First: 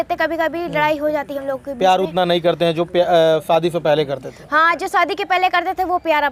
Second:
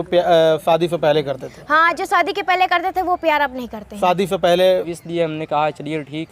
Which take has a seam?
second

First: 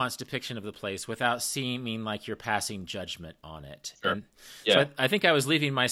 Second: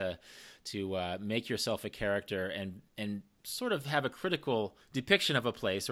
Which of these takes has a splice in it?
second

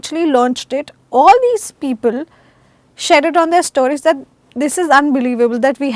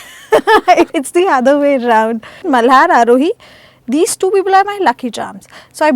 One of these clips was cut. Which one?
second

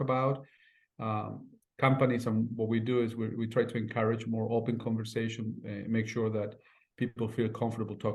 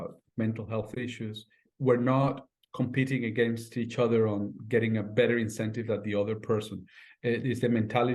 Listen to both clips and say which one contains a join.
second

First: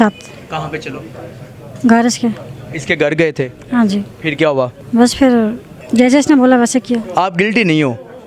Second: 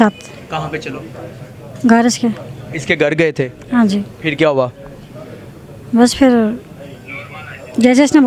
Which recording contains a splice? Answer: first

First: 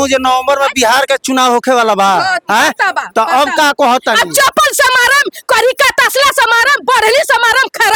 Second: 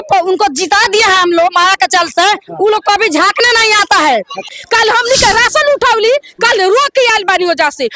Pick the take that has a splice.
second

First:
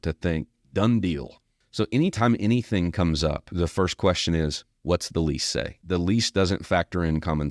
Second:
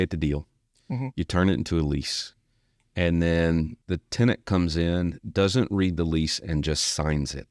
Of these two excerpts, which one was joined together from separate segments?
first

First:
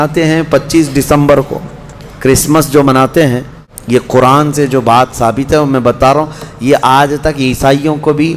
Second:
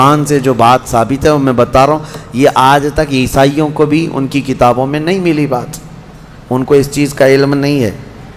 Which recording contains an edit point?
first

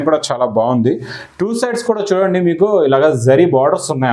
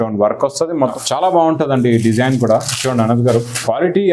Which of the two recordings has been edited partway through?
second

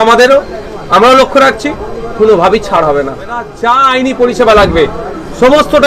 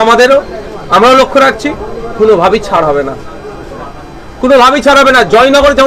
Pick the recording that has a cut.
first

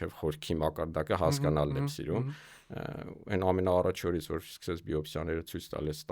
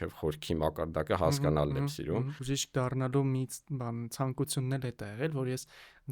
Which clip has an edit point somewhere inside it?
second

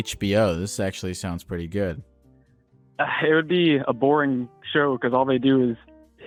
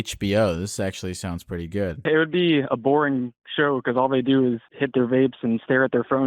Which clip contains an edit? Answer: second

